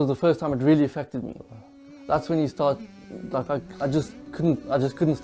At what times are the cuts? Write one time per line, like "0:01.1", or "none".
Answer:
none